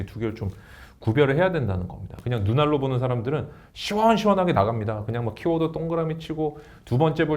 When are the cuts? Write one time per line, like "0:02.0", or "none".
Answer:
0:02.1